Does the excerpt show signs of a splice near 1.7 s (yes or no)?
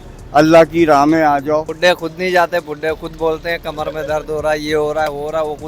yes